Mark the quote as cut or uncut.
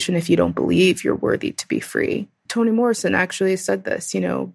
cut